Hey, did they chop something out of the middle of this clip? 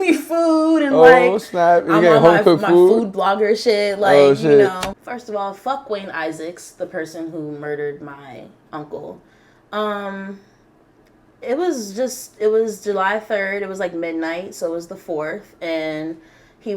yes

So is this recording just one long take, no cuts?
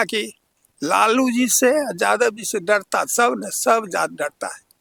yes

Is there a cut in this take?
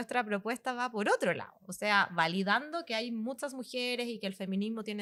no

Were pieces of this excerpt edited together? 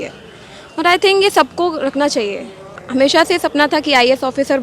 yes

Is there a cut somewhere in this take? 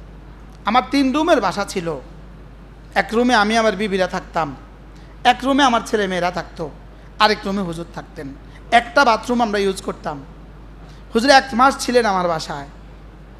no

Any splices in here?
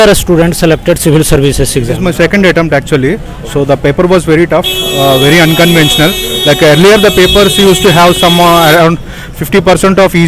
yes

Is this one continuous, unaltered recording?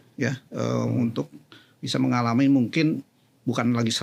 yes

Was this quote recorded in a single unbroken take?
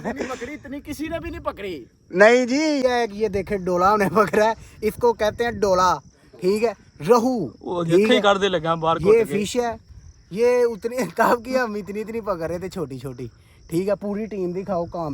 no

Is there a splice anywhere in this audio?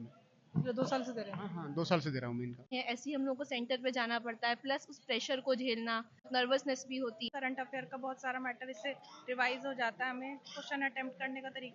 yes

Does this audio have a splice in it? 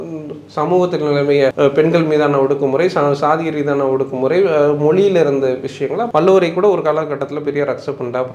yes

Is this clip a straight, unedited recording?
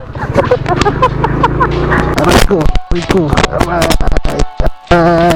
no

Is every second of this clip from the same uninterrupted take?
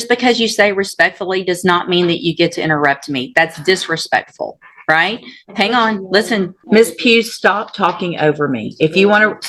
no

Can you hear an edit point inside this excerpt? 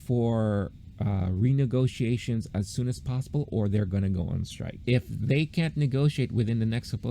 yes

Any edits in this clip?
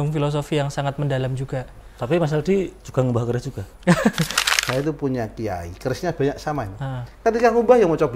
yes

